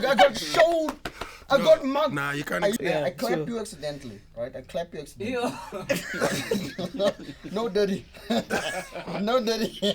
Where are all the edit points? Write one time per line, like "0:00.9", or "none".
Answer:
0:02.8